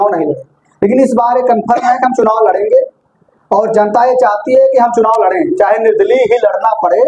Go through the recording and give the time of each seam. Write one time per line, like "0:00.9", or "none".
none